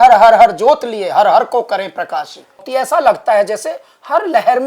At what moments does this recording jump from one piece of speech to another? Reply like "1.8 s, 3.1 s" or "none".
2.6 s